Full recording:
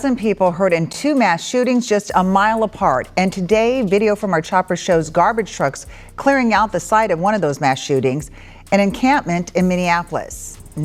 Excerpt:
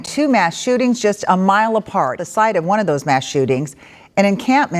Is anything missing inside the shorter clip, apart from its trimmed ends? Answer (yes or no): yes